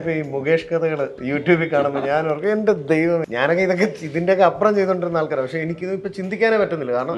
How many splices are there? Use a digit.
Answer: 3